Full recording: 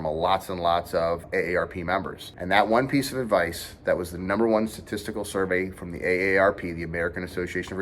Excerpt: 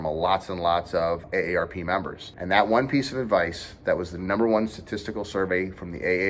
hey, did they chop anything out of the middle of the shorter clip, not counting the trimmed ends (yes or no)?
no